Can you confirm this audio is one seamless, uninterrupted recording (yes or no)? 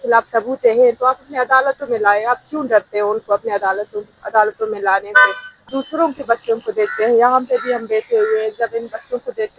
no